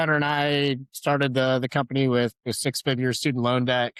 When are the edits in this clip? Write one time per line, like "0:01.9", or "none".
none